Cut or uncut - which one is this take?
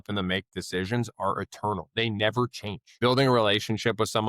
cut